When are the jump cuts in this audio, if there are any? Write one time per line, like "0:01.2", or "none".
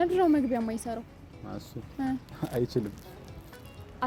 none